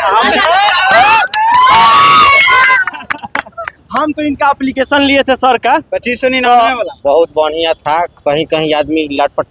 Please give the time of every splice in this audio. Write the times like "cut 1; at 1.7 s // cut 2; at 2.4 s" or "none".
cut 1; at 6.9 s